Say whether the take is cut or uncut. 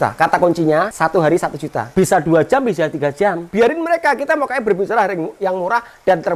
cut